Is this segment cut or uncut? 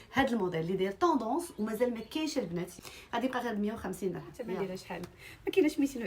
cut